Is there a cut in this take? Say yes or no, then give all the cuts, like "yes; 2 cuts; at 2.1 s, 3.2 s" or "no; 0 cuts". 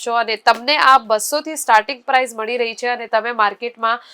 no; 0 cuts